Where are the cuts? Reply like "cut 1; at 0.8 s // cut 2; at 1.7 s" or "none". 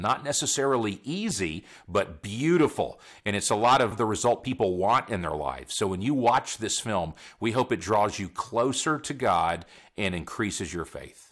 cut 1; at 3.9 s